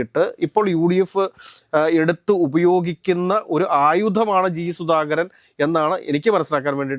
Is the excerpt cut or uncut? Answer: uncut